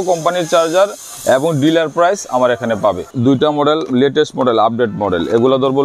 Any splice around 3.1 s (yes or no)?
yes